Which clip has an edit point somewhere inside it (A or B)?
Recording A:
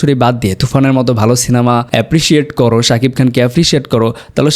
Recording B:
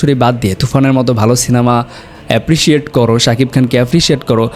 A